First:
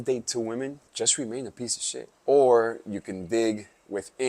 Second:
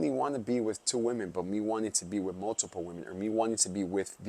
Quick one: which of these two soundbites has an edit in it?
first; 2 cuts; at 0.8 s, 2.1 s

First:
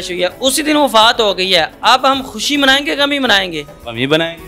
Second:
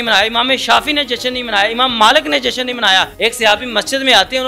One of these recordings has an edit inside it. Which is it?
second; 1 cut; at 3.1 s

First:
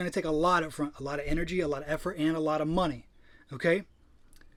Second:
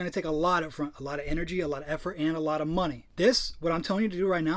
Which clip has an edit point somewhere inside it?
second; 1 cut; at 3.0 s

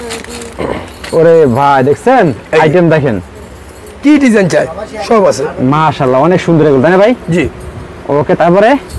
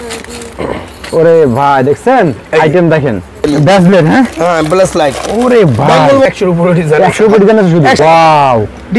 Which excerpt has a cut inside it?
second; 3 cuts; at 3.5 s, 6.2 s, 8.0 s

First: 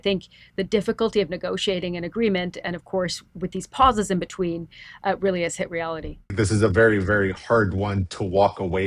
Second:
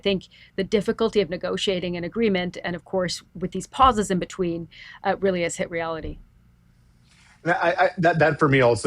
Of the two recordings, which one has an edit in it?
first; 1 cut; at 6.3 s

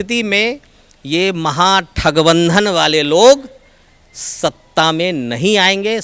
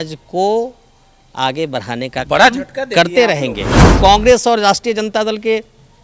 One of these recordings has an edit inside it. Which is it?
second; 1 cut; at 3.8 s

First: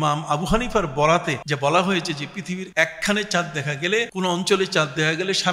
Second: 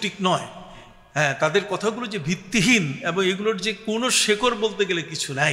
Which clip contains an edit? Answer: first; 3 cuts; at 1.4 s, 2.7 s, 4.1 s

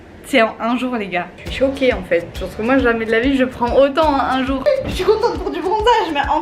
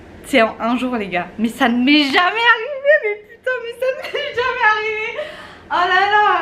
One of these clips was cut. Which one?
first; 2 cuts; at 1.3 s, 4.6 s

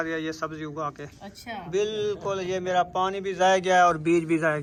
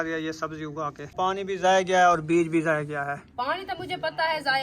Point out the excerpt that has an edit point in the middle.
second; 1 cut; at 1.1 s

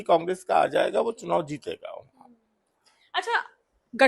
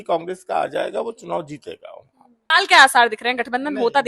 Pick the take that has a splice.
second; 1 cut; at 2.5 s

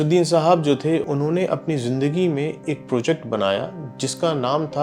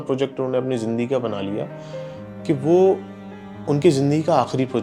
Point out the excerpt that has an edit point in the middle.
first; 1 cut; at 1.0 s

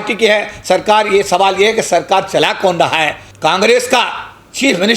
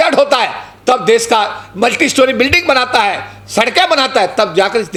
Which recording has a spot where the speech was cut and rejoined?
first; 1 cut; at 3.2 s

